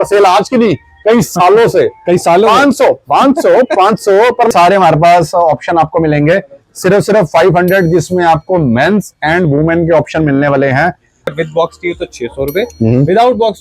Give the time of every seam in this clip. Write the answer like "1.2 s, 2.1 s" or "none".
4.5 s, 11.3 s